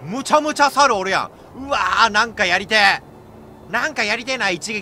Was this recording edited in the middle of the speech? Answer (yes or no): no